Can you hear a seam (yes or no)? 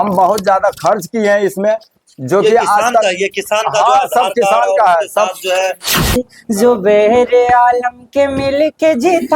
yes